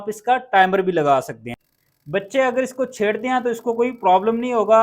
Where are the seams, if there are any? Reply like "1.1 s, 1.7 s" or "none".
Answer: 2.2 s